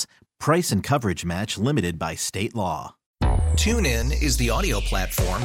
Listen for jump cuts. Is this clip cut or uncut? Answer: cut